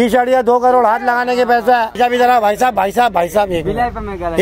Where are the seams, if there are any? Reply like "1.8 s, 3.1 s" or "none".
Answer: 1.9 s